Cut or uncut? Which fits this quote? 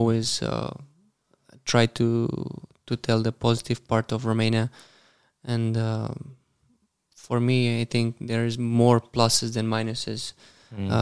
uncut